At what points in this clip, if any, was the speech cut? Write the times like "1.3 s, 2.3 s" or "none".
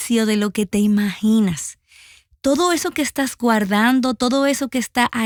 none